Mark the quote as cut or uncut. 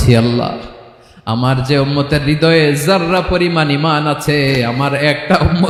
uncut